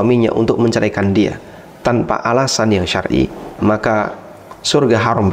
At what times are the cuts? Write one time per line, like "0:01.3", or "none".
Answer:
0:03.6

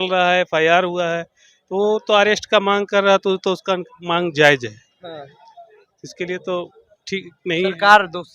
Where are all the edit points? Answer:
none

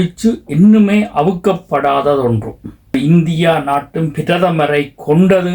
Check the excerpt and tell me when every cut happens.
0:02.9

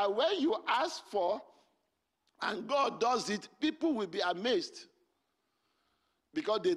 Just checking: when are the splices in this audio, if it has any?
none

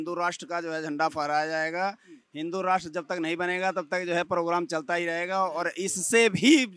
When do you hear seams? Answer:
none

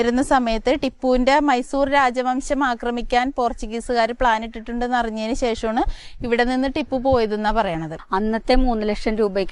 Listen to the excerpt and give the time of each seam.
0:07.9

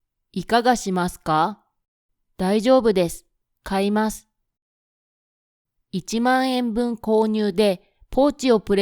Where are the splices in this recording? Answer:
0:05.3

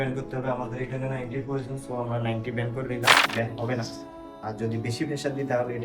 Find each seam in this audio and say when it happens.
0:03.3

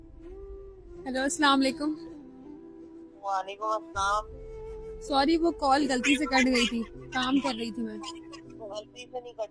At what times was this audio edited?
0:01.0

